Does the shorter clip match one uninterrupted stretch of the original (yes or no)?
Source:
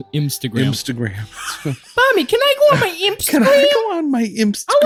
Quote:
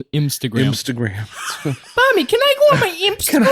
yes